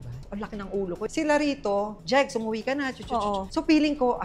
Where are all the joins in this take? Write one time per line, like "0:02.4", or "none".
0:01.1